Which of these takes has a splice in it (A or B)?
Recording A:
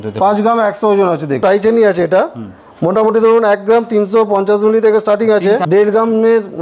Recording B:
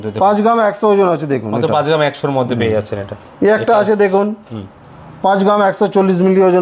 A